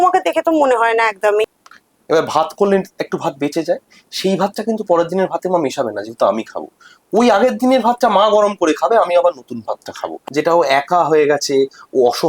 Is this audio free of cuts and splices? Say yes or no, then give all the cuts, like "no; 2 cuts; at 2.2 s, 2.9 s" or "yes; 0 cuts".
no; 2 cuts; at 1.6 s, 10.2 s